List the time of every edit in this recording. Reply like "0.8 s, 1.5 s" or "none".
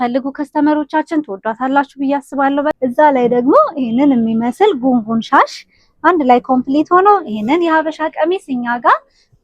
2.8 s